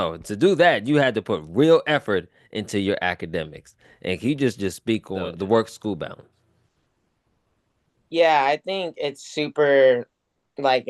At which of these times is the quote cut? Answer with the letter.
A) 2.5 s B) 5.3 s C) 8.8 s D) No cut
B